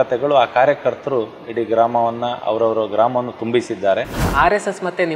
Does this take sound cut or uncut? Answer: cut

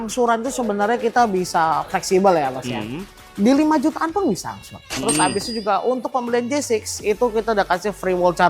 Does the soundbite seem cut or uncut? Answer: cut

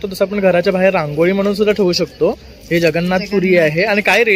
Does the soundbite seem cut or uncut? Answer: uncut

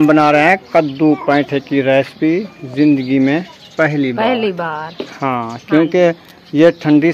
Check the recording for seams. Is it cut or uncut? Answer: uncut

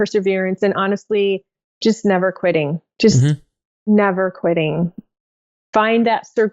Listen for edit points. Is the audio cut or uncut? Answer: cut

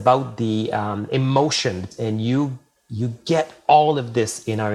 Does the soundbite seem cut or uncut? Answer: cut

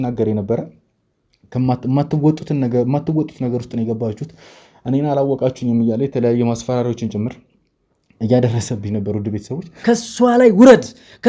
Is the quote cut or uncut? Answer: cut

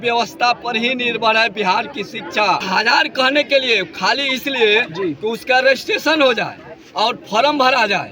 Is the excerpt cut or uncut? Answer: cut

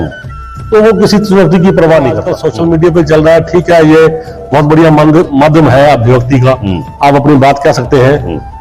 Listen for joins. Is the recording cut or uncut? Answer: cut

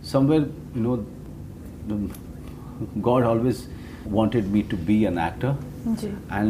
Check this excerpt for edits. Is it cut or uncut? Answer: uncut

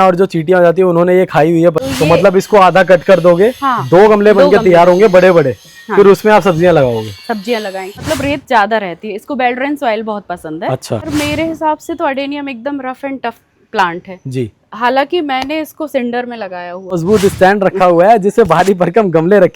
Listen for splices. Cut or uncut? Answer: cut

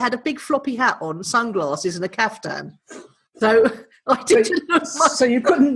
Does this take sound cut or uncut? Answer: uncut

